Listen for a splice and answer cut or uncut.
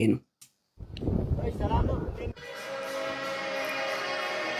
uncut